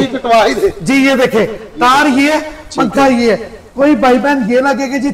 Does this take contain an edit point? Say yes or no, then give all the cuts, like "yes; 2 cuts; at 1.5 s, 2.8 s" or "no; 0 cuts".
no; 0 cuts